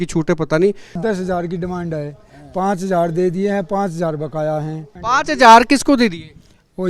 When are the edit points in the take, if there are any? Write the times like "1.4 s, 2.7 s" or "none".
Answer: 1.0 s, 4.9 s